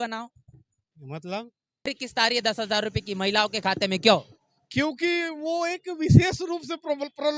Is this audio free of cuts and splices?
no; 1 cut; at 1.9 s

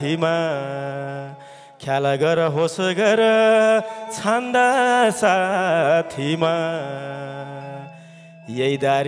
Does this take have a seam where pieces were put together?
no; 0 cuts

